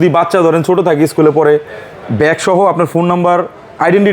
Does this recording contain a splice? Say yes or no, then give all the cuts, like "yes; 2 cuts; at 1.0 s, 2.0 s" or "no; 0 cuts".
no; 0 cuts